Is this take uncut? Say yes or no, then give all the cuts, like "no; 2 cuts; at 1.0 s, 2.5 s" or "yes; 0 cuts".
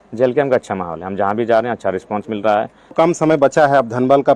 no; 1 cut; at 2.9 s